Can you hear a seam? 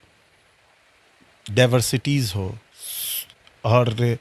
no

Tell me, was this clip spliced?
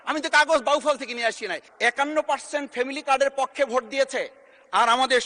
yes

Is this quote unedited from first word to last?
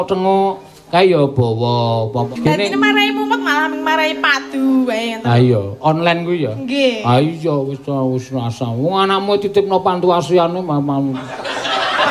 no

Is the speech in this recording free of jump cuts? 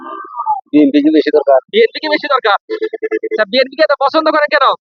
yes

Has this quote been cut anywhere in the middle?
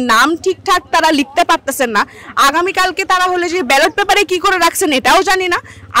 no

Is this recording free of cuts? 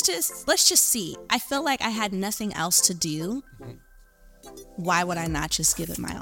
yes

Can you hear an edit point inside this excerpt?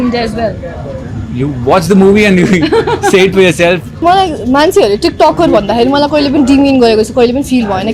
yes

